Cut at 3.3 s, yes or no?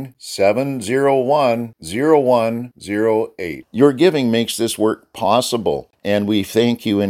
no